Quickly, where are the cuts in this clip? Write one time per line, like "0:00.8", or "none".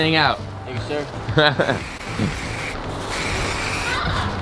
none